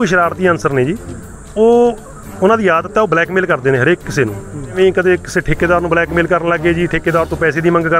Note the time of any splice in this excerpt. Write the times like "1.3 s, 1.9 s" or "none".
4.7 s